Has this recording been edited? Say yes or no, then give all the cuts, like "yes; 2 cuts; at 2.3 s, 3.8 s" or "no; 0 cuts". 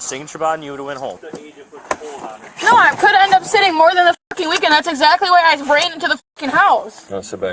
yes; 1 cut; at 1.3 s